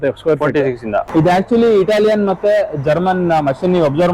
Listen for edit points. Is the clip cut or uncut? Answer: cut